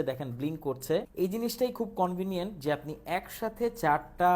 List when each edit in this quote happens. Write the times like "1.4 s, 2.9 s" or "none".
1.1 s